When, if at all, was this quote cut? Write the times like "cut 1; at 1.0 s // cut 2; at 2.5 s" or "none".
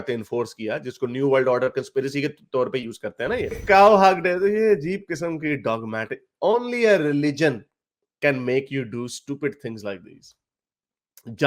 cut 1; at 3.6 s